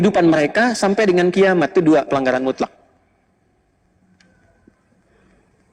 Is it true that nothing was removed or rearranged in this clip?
yes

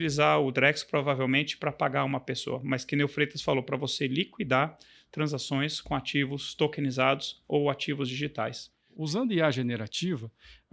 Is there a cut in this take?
yes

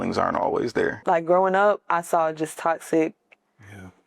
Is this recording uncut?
no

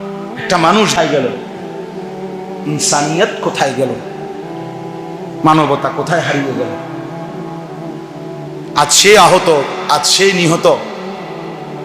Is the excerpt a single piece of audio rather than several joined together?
yes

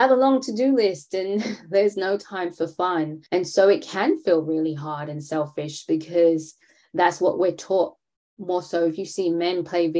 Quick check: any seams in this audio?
yes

